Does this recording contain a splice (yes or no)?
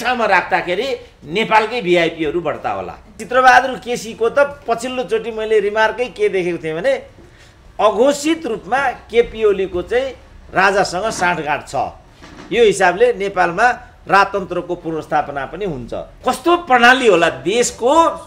yes